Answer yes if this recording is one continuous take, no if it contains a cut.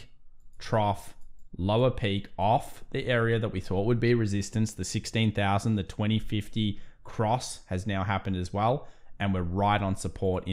yes